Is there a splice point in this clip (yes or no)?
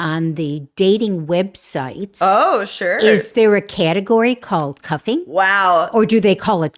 no